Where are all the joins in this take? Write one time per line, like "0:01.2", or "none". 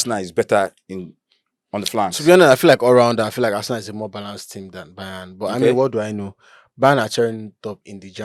none